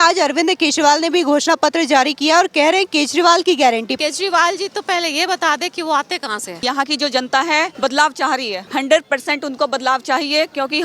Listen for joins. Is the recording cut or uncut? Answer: cut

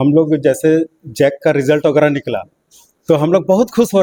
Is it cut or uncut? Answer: uncut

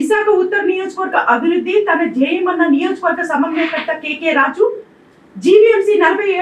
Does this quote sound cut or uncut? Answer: uncut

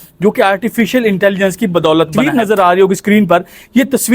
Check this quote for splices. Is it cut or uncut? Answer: cut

